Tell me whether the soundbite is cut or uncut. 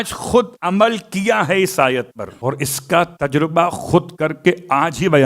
cut